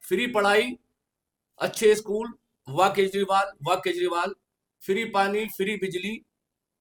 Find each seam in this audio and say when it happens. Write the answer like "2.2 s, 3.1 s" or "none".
none

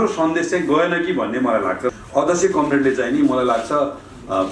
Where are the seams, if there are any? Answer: 1.9 s

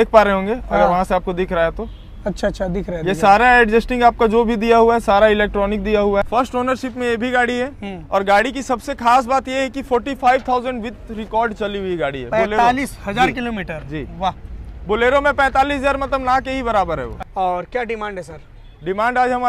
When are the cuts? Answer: 6.2 s, 17.2 s

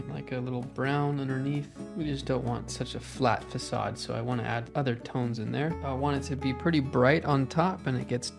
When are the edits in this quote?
1.8 s, 4.7 s, 5.8 s

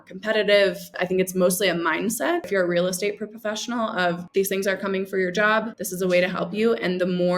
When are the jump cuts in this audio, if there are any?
0.9 s, 2.5 s, 4.2 s, 5.8 s

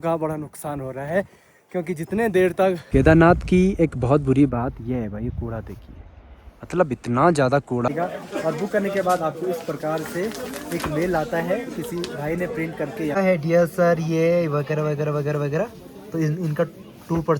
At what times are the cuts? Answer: 2.8 s, 7.9 s, 13.2 s

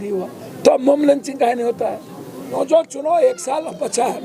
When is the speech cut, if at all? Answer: 2.6 s

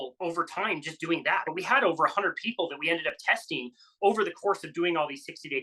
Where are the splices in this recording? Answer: 1.4 s

